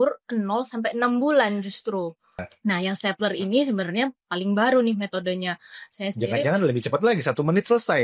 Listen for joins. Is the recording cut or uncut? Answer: cut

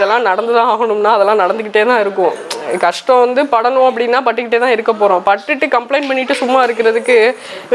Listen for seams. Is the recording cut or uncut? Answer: uncut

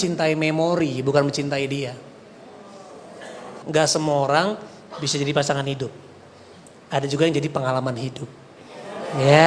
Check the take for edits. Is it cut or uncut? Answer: cut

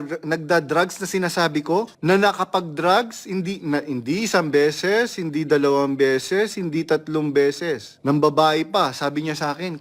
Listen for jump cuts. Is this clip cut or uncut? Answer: cut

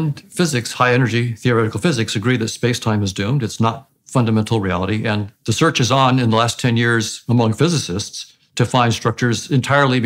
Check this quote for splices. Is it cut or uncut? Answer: uncut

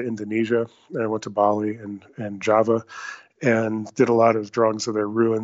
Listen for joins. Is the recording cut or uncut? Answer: uncut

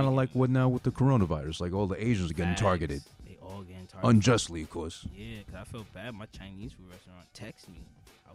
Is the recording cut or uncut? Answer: uncut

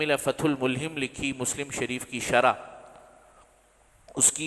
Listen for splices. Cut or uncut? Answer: uncut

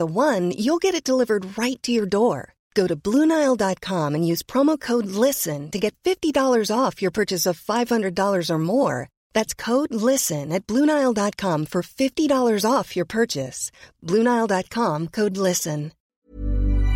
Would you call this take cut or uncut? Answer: cut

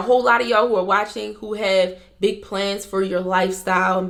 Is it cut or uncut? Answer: uncut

